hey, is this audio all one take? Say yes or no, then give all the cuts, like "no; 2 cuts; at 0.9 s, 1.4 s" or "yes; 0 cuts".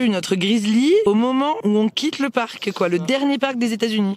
no; 1 cut; at 1.3 s